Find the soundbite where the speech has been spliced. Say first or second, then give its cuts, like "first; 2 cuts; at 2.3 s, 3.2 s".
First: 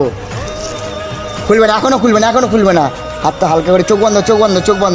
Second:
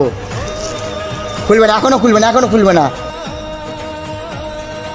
second; 1 cut; at 3.1 s